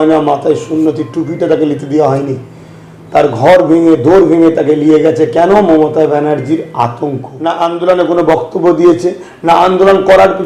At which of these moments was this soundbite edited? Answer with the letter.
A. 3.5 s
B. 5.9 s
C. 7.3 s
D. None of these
C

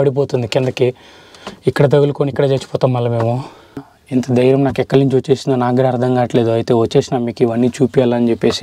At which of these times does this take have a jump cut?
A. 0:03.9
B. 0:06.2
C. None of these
A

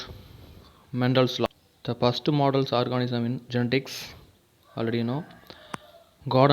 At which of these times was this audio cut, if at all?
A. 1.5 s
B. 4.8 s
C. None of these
A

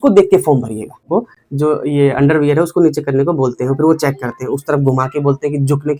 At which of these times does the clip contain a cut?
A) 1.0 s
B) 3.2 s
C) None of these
A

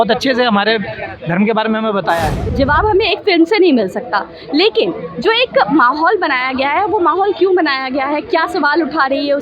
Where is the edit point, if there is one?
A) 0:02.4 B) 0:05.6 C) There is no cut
A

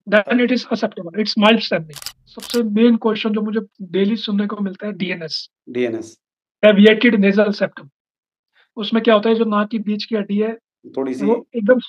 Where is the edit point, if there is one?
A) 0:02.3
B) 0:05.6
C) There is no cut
A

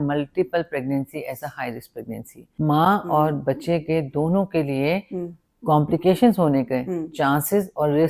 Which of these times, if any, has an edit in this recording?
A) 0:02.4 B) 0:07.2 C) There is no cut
A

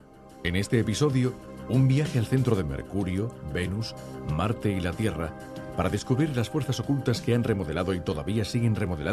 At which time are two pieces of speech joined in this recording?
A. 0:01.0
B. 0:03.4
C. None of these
A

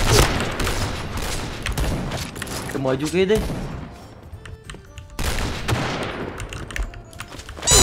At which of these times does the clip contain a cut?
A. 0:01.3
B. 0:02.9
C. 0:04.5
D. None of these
C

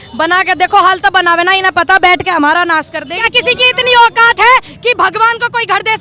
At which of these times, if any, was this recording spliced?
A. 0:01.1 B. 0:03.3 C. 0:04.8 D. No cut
B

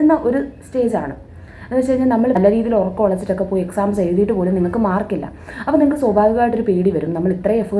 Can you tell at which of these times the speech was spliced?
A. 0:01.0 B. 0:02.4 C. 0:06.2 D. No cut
B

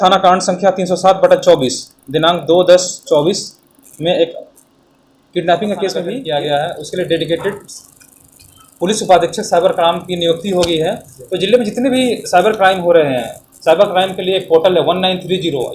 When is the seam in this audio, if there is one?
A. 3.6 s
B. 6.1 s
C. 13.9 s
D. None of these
B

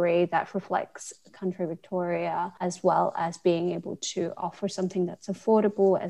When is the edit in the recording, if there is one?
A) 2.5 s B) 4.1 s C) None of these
A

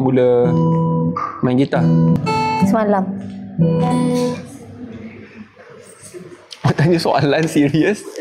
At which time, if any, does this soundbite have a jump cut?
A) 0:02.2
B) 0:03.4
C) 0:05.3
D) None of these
A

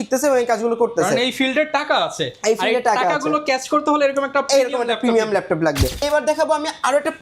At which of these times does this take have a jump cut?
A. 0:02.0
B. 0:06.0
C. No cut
B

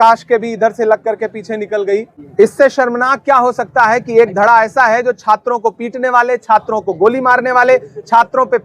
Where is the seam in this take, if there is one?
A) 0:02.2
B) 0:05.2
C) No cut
A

